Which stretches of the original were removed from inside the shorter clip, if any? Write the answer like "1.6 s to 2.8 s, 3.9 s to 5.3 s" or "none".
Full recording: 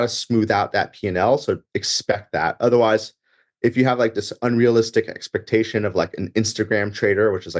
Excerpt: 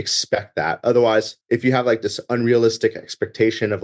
3.1 s to 3.5 s